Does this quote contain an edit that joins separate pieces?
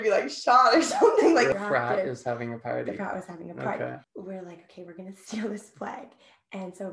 yes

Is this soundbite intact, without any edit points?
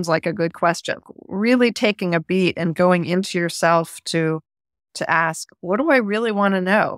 no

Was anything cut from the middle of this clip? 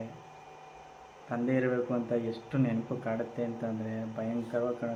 no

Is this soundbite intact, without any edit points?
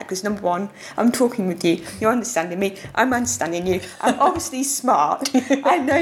yes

